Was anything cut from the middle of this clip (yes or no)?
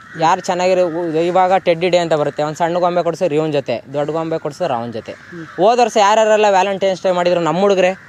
no